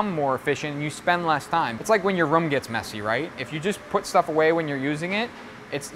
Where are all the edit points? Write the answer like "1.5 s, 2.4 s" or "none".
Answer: 1.8 s